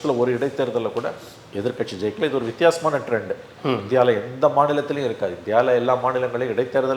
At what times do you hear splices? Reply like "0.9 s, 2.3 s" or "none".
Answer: none